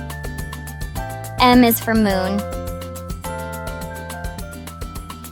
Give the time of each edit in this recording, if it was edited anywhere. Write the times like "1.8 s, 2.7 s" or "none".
1.3 s, 2.4 s, 4.0 s